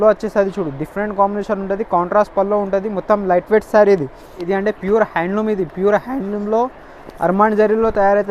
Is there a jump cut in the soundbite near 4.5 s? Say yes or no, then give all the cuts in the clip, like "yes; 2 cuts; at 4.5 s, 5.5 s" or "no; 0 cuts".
yes; 1 cut; at 4.5 s